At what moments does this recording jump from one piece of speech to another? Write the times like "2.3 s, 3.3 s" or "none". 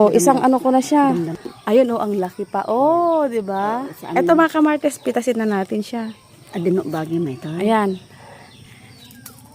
1.4 s